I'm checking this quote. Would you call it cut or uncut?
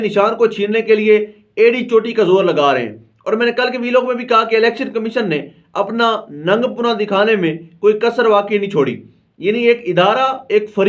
uncut